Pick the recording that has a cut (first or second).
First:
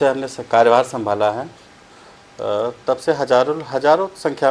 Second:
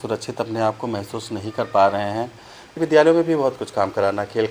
second